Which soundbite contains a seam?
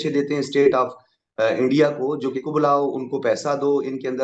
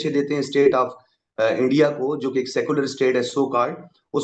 first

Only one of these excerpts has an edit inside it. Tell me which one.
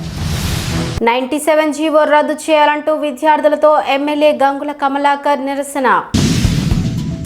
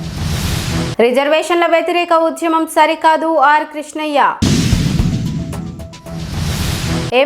first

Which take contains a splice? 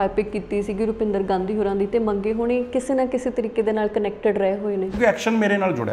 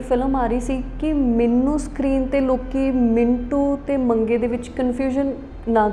first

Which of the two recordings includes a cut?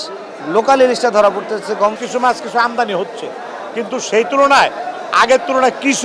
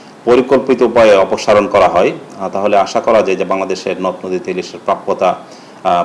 first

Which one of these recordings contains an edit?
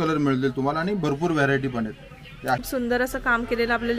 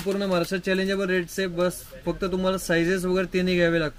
first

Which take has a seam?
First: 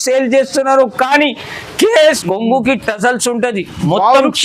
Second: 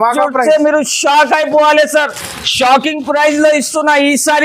first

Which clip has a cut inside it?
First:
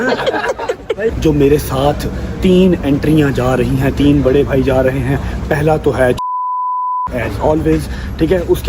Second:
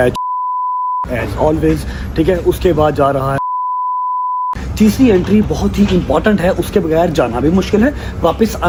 first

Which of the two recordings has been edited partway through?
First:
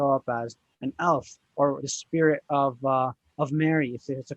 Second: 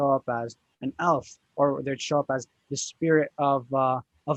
first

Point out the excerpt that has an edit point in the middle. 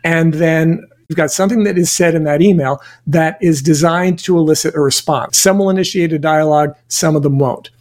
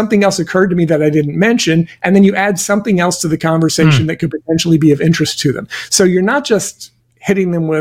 first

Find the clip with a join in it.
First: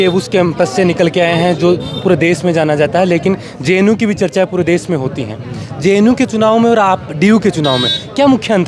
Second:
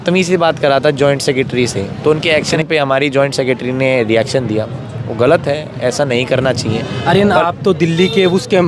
second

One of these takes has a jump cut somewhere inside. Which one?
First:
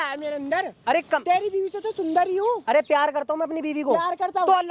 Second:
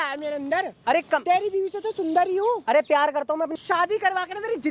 second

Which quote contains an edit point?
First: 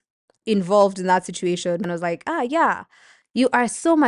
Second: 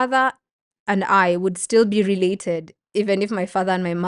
first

